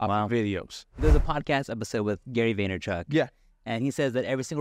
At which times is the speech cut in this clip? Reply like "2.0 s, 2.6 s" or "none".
1.0 s